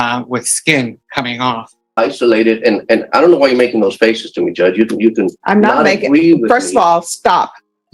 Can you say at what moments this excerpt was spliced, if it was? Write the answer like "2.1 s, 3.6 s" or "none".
1.9 s